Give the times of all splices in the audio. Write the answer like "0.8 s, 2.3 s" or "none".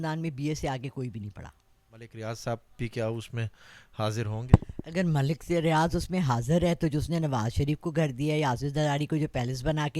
2.1 s